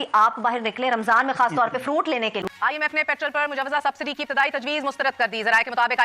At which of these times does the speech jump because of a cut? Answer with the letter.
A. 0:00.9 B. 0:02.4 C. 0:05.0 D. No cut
B